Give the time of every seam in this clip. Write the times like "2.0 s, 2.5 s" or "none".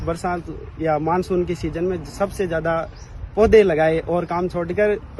none